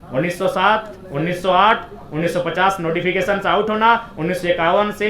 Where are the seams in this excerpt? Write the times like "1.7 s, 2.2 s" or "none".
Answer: none